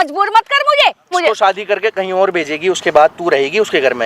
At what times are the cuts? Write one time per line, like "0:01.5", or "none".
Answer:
0:01.1